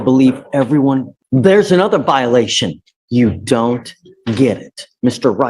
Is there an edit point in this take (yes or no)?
yes